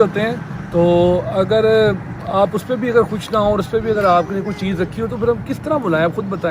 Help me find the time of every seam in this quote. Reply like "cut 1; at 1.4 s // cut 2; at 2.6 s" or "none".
none